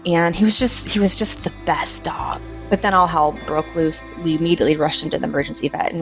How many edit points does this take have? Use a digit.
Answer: 2